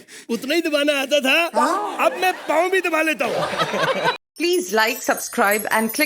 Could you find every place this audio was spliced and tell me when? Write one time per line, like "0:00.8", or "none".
0:04.1